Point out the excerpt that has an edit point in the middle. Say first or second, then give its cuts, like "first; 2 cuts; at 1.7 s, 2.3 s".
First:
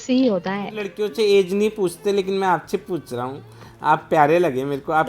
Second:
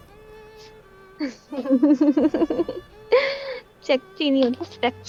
first; 1 cut; at 1.0 s